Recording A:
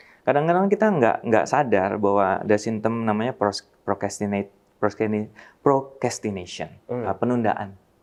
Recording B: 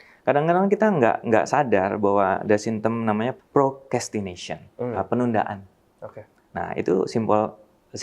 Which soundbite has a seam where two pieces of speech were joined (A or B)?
B